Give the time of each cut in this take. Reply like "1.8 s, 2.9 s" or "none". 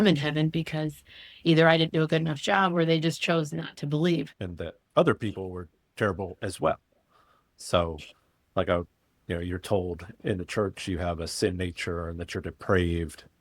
4.4 s